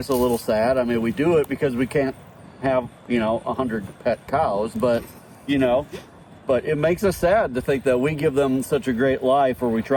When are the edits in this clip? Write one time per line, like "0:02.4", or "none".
none